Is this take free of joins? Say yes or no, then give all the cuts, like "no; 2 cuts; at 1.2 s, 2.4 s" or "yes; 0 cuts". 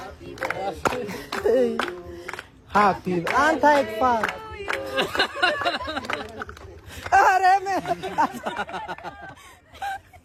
yes; 0 cuts